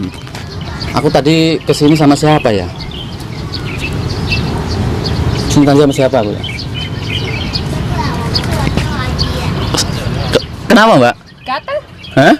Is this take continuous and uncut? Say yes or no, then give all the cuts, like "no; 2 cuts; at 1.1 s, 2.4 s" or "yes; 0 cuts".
yes; 0 cuts